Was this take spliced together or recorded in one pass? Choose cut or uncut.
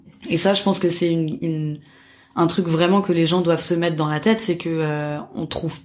uncut